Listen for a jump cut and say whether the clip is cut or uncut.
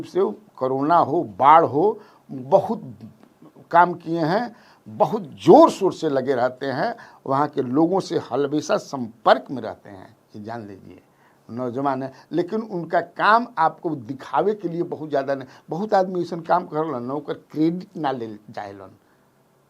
uncut